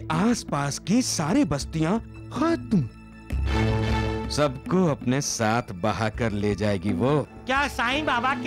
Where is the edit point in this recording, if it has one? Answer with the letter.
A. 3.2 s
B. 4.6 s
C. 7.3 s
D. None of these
C